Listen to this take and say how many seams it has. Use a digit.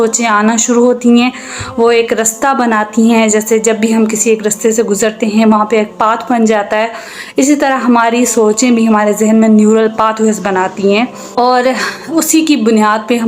1